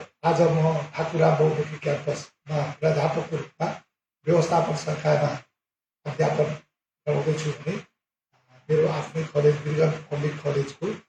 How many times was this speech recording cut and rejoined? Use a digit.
0